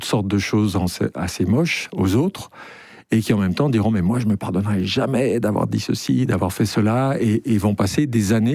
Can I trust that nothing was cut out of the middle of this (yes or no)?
yes